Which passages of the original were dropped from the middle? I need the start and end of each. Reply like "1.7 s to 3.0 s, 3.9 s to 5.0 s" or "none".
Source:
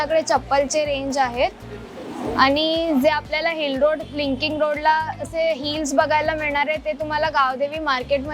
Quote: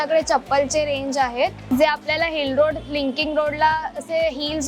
1.7 s to 2.9 s